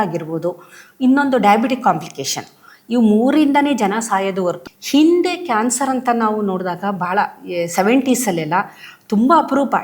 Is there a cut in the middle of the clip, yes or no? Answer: yes